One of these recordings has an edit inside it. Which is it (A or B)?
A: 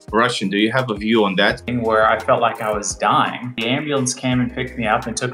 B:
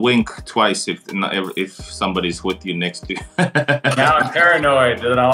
A